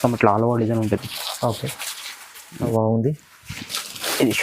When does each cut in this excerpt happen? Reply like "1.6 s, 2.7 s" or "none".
2.7 s